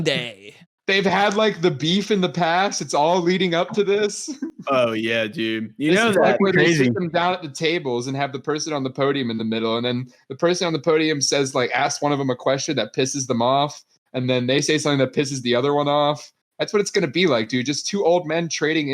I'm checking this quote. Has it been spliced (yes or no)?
no